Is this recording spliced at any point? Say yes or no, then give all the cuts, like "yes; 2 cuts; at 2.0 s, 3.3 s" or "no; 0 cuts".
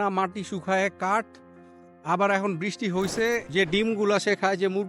yes; 1 cut; at 3.5 s